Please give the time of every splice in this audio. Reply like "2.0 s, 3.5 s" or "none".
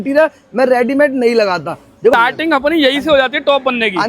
2.1 s

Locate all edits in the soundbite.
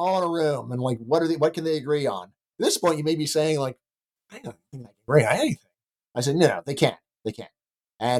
2.5 s

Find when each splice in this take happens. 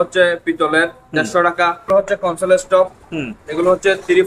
1.9 s

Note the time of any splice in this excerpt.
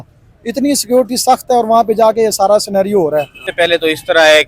3.4 s

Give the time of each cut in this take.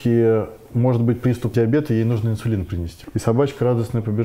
1.5 s, 2.9 s

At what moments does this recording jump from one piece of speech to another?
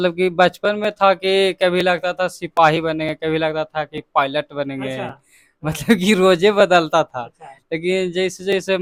none

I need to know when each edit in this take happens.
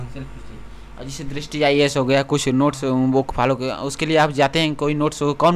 none

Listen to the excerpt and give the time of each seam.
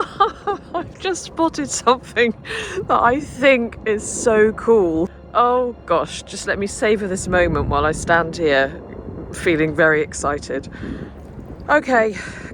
5.1 s

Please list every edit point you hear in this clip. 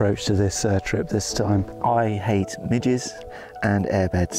1.8 s

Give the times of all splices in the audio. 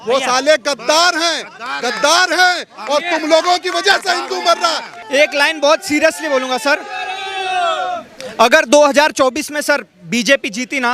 5.0 s

